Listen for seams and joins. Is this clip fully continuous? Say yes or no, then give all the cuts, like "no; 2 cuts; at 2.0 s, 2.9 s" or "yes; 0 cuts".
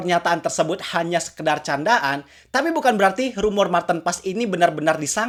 yes; 0 cuts